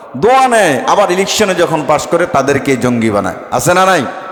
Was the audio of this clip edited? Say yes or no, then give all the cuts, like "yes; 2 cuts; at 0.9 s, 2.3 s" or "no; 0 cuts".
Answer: no; 0 cuts